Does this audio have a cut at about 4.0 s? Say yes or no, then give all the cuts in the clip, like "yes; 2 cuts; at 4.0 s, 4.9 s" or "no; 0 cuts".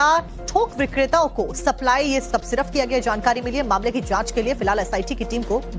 no; 1 cut; at 1.8 s